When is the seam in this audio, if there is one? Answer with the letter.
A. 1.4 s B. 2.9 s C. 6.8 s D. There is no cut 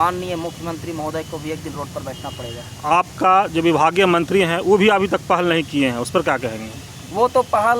D